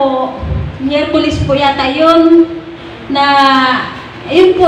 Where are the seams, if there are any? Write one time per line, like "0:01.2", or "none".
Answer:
none